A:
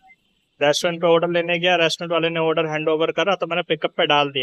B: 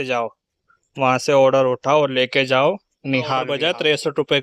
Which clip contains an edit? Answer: B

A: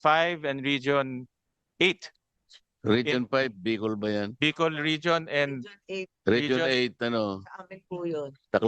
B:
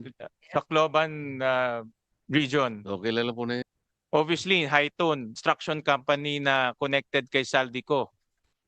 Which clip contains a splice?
B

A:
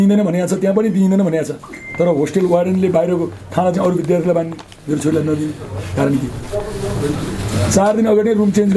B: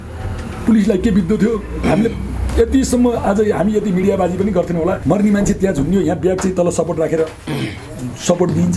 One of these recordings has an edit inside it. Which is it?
B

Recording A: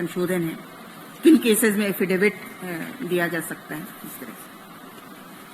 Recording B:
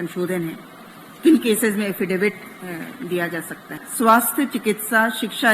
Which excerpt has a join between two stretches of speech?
B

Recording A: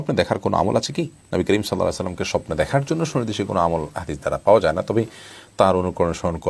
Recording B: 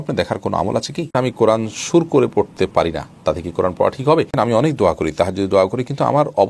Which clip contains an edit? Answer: B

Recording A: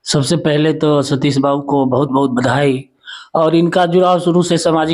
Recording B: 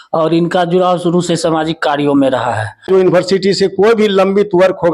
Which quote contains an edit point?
B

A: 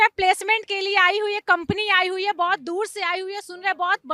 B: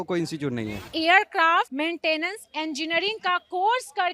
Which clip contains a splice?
B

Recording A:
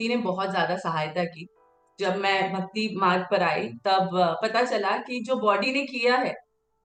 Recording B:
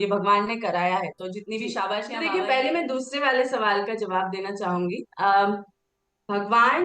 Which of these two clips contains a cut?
B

